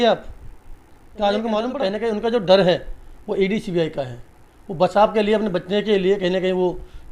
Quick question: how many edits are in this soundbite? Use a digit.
1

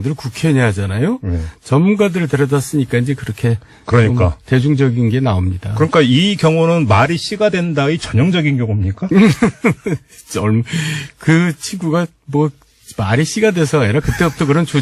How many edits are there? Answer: 0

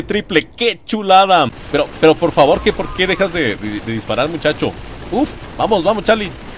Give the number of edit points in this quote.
1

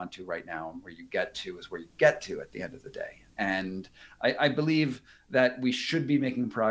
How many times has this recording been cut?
1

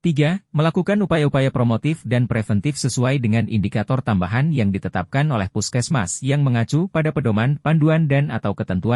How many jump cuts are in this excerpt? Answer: 0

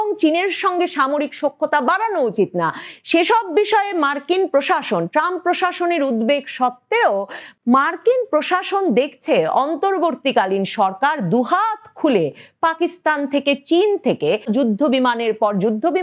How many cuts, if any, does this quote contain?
1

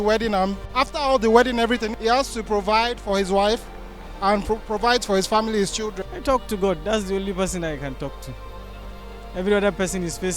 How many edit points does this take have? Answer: 2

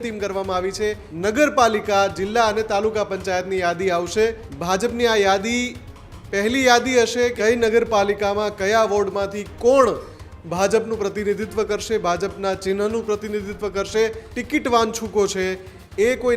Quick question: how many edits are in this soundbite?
4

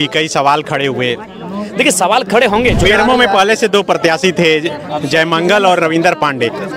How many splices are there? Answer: 1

